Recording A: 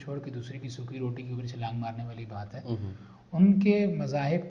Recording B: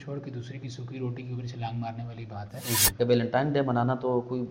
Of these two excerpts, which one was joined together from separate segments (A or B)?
B